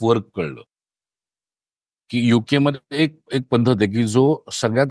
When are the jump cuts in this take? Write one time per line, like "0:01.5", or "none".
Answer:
none